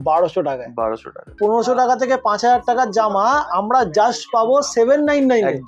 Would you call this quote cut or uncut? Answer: cut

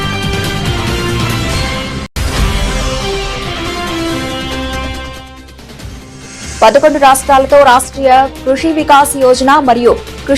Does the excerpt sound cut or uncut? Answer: cut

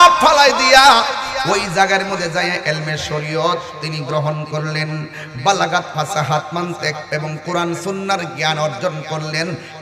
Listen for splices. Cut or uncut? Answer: uncut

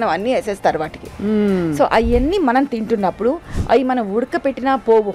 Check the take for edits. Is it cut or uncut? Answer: uncut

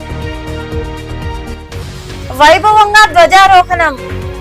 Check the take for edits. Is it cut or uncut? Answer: uncut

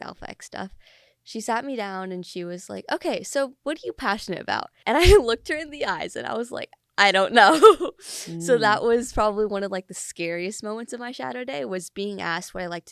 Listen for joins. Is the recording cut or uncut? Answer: cut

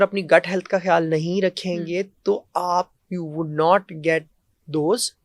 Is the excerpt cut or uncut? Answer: uncut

